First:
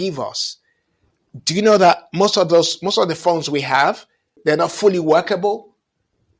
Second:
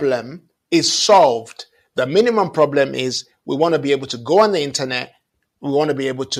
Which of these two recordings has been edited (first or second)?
first